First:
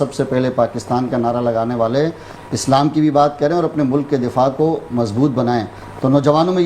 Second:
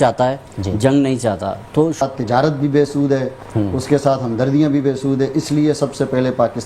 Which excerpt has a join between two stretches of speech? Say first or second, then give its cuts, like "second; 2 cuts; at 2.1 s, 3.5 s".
second; 1 cut; at 2.0 s